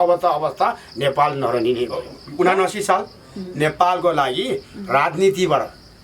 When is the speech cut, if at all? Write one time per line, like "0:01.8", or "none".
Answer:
0:02.2